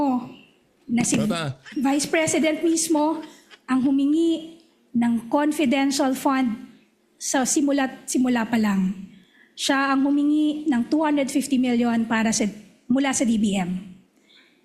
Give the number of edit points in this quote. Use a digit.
1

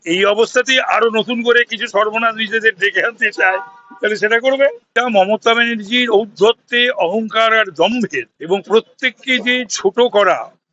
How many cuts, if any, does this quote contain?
2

